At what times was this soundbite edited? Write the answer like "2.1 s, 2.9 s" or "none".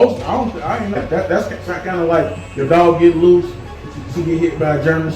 1.0 s